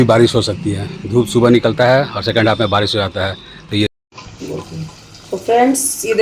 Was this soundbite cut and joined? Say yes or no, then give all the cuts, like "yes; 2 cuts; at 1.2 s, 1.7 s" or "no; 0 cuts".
yes; 1 cut; at 3.9 s